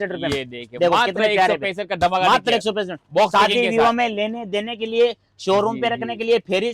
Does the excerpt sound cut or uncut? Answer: uncut